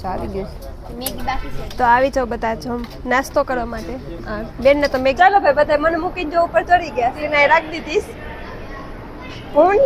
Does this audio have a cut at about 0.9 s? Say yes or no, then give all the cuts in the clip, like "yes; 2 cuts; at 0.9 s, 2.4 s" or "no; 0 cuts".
yes; 3 cuts; at 0.9 s, 5.1 s, 7.2 s